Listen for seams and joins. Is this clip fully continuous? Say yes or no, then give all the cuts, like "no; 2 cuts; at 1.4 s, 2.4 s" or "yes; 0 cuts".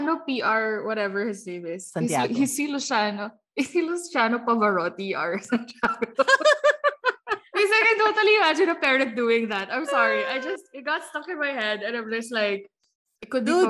yes; 0 cuts